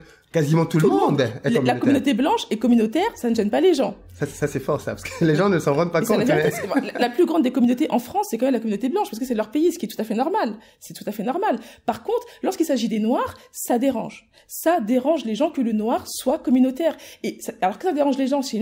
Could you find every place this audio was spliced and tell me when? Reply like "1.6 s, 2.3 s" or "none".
none